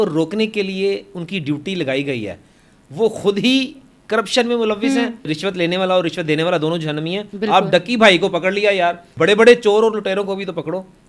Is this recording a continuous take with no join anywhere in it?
no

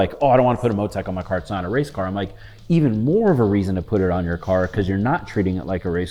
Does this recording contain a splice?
no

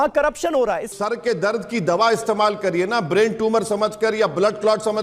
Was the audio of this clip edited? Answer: yes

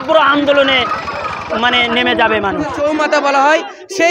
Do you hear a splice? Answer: yes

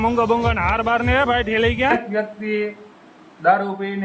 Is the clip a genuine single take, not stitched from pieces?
no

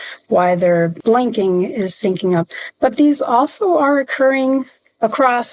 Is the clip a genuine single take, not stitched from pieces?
no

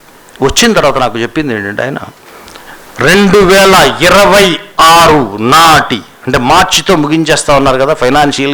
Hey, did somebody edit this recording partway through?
yes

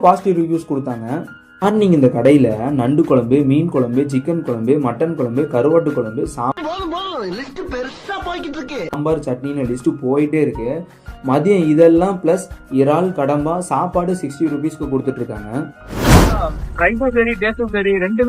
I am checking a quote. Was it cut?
no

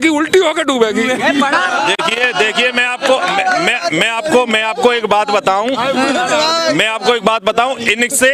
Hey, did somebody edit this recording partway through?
no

